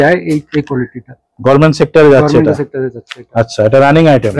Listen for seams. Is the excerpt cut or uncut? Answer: uncut